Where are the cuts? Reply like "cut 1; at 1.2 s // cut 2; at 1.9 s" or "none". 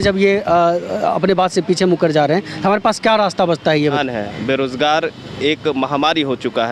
cut 1; at 4.0 s